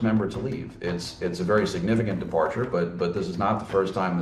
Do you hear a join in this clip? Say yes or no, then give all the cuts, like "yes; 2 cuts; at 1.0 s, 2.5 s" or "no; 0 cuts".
no; 0 cuts